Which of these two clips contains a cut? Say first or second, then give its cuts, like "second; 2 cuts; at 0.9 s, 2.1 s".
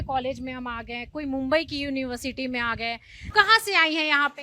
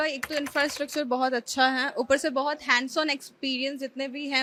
first; 1 cut; at 3.3 s